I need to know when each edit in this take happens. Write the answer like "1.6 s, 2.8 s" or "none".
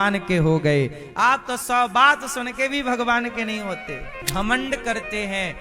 4.1 s